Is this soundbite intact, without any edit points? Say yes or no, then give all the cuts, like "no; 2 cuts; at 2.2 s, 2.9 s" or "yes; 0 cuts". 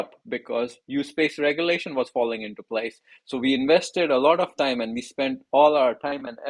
yes; 0 cuts